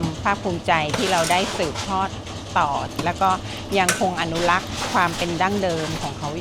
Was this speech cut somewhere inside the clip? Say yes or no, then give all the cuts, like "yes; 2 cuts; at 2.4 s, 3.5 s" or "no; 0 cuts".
yes; 1 cut; at 2.9 s